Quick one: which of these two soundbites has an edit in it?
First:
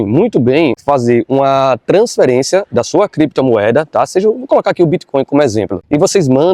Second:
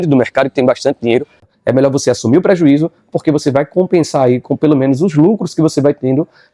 second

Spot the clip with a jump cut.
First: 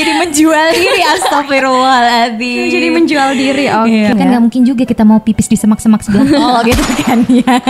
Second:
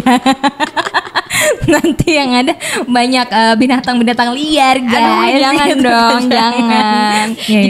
first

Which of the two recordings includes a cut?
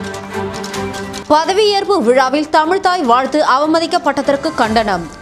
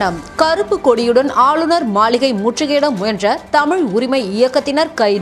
first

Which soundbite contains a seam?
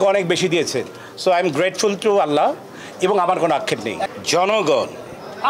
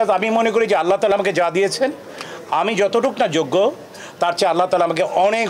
first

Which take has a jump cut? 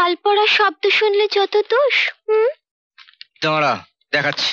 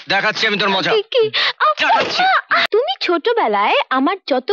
second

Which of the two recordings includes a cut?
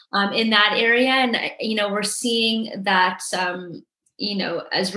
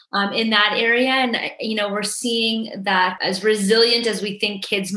second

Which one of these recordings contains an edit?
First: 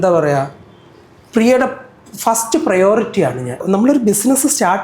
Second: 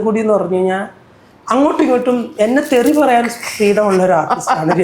first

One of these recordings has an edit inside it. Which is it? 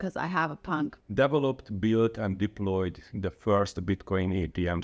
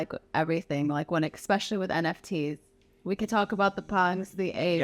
first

